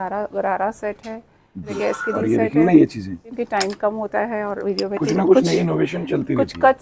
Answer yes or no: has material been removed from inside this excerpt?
yes